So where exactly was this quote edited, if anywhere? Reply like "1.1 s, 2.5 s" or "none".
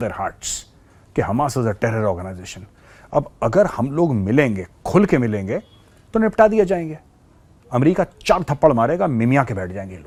none